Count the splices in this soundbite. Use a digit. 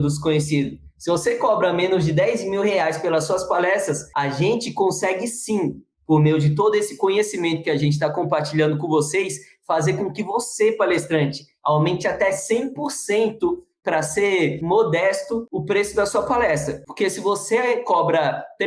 1